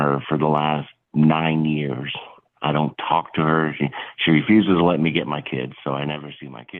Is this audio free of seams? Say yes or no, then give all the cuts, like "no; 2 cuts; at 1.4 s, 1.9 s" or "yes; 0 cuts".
yes; 0 cuts